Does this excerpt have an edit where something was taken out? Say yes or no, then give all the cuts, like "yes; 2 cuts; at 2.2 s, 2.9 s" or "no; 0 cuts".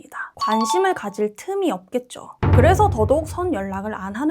no; 0 cuts